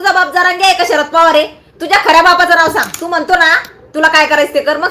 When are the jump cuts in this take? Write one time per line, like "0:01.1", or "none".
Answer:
none